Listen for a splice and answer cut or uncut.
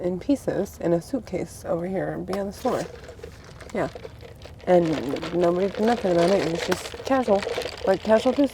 uncut